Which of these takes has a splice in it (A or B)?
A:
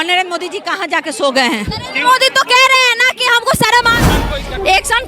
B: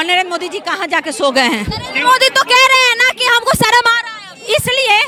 A